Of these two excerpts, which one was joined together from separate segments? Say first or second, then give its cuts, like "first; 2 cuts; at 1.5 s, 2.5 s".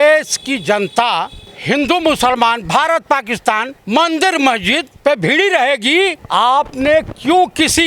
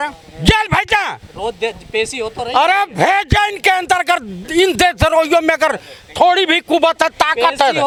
first; 4 cuts; at 1.5 s, 3.7 s, 4.9 s, 6.2 s